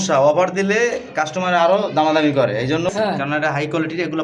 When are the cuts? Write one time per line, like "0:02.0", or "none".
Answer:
0:02.9